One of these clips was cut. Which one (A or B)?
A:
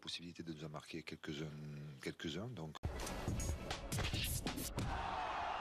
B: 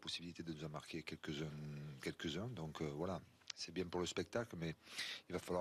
B